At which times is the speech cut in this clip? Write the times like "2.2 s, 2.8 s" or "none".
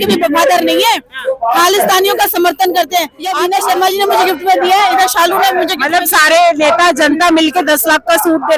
3.2 s